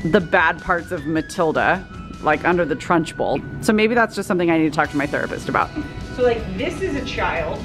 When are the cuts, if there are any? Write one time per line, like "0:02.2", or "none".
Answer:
0:03.4
0:05.9